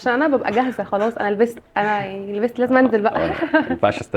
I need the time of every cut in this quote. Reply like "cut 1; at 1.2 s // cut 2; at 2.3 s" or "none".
cut 1; at 1.6 s